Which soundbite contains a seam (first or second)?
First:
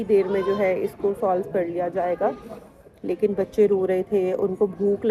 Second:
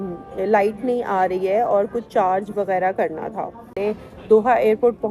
second